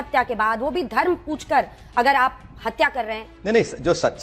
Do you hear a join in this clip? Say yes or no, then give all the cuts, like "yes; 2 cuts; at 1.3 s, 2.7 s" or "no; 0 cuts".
yes; 1 cut; at 3.2 s